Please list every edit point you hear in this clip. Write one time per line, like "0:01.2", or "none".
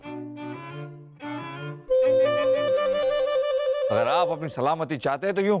0:03.9